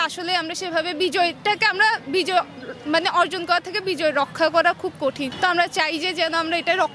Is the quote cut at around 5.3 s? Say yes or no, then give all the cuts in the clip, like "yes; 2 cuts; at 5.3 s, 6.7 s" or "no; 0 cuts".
yes; 1 cut; at 5.3 s